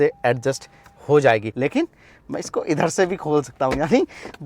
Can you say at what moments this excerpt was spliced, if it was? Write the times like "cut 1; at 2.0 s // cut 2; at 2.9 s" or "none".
cut 1; at 1.5 s